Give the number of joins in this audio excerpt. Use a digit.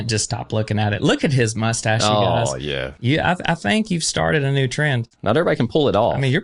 2